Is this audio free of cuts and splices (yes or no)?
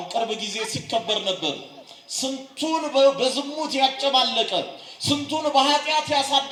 yes